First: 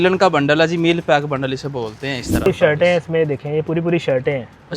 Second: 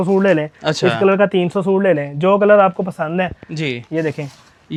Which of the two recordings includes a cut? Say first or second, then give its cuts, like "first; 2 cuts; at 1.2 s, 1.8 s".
first; 1 cut; at 2.5 s